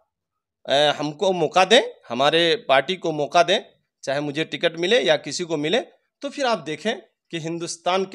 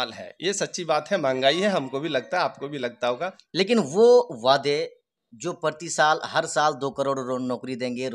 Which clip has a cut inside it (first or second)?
second